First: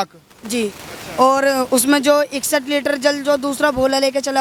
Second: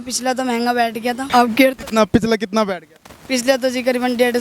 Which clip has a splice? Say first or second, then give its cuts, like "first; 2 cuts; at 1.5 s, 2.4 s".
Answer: second; 1 cut; at 1.2 s